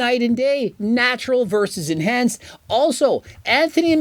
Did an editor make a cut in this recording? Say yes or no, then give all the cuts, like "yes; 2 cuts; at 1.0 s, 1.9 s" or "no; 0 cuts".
no; 0 cuts